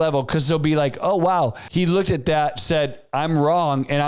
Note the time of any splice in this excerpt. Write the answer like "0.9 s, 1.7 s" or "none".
1.6 s